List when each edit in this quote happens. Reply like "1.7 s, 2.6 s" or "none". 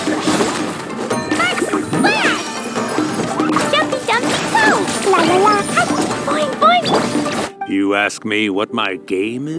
7.4 s